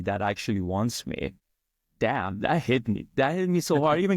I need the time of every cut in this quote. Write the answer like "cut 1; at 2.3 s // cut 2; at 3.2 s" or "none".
cut 1; at 1.8 s